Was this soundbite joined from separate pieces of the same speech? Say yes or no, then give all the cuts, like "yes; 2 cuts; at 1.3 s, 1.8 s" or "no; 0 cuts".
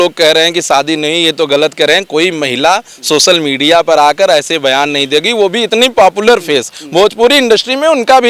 no; 0 cuts